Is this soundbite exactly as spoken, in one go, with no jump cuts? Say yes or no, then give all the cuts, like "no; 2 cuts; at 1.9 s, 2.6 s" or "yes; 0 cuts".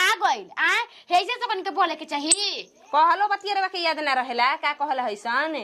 yes; 0 cuts